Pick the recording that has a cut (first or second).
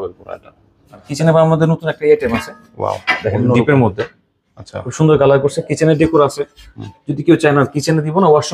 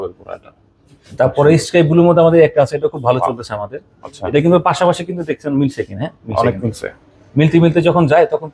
first